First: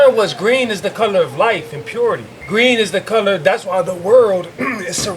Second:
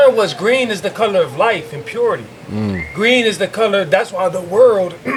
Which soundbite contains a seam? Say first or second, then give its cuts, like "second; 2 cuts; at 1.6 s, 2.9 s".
first; 1 cut; at 2.4 s